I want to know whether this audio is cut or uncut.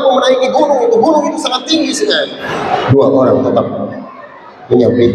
cut